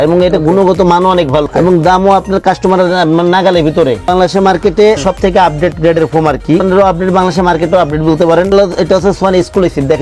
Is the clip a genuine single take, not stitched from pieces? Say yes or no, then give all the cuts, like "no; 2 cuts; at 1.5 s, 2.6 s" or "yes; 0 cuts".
no; 5 cuts; at 1.5 s, 4.1 s, 5.0 s, 6.6 s, 8.5 s